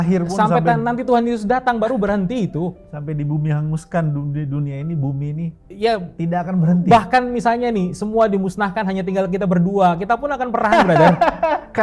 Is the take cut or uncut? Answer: uncut